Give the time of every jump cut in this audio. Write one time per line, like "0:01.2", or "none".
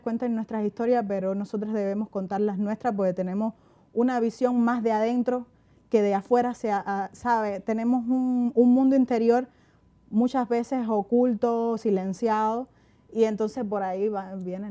none